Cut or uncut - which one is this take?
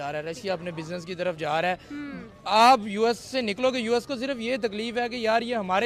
uncut